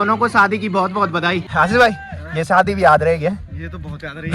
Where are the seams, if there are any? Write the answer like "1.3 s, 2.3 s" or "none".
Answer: 1.5 s